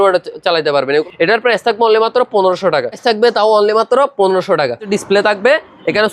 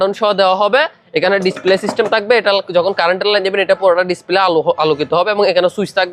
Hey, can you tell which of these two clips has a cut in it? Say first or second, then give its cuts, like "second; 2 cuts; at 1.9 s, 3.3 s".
first; 3 cuts; at 1.1 s, 3.0 s, 4.9 s